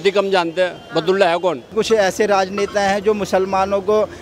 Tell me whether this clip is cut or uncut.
cut